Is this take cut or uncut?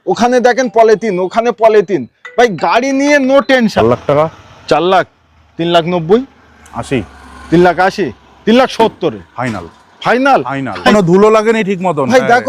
cut